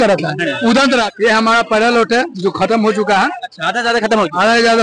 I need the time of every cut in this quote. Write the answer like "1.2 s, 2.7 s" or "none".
1.1 s

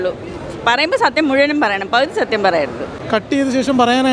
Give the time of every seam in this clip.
2.9 s

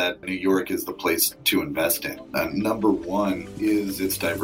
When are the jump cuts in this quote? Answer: 1.3 s, 2.1 s, 3.5 s

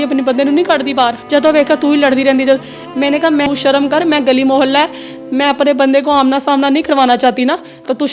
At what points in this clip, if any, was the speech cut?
1.2 s, 3.5 s

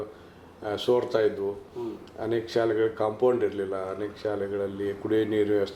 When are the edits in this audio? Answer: none

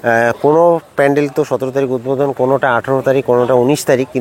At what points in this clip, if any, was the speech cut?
none

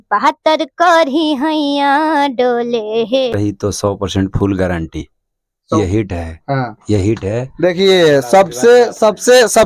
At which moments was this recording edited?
3.3 s

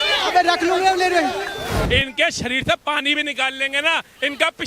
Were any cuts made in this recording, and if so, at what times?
1.8 s

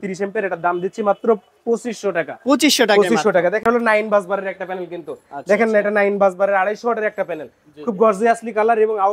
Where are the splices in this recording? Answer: 3.6 s

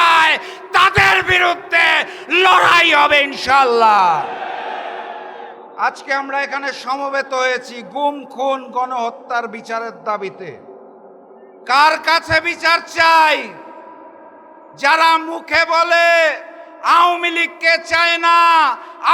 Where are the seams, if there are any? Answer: none

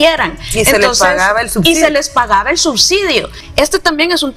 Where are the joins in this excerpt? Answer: 3.4 s

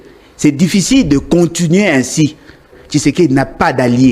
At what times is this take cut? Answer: 2.7 s

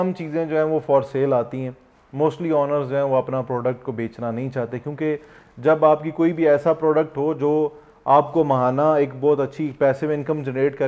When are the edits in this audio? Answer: none

